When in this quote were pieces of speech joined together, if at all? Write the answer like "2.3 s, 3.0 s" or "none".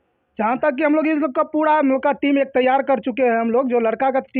none